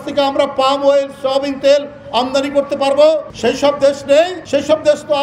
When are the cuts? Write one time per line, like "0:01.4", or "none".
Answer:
0:03.3
0:04.4